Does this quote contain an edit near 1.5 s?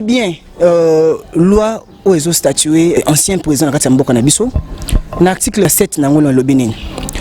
no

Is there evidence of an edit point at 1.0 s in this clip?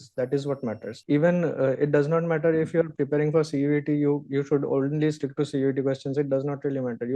yes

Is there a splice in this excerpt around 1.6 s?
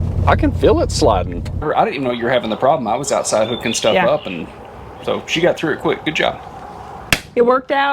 yes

